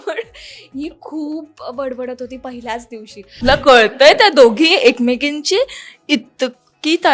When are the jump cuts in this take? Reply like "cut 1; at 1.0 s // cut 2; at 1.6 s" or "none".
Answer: cut 1; at 3.3 s